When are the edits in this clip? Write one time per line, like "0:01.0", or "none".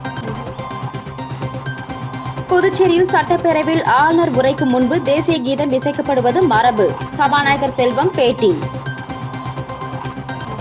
0:01.1

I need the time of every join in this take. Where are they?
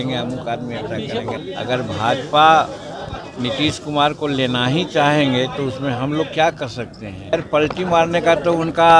0:01.4
0:07.3

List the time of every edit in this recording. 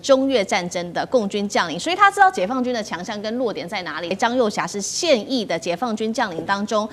0:04.1

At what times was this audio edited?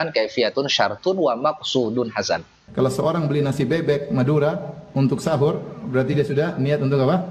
0:02.6

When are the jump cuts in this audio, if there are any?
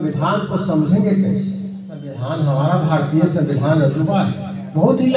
0:02.2

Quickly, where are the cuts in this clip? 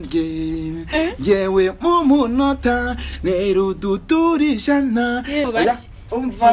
0:05.5

